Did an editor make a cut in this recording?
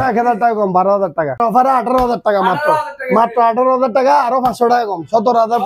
yes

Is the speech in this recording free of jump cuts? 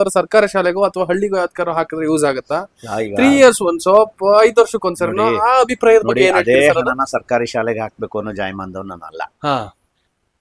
yes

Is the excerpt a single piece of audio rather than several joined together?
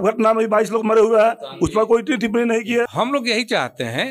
no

